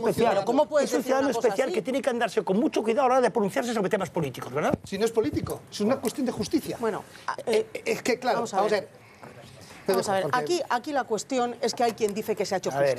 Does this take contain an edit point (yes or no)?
no